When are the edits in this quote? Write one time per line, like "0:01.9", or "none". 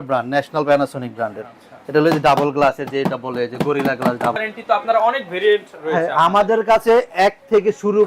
0:04.4